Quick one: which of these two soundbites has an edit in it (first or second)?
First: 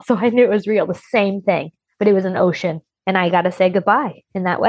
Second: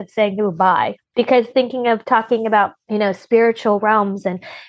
second